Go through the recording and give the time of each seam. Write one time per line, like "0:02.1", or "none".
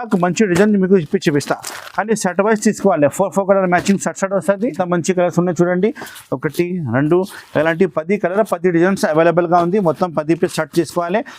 0:04.7